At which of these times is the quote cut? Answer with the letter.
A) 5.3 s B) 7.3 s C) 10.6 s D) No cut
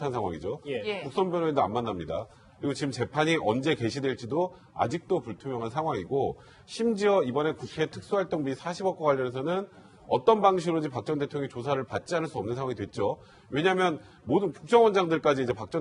C